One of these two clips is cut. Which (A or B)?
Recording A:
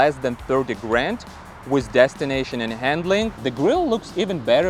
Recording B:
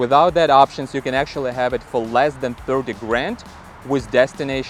A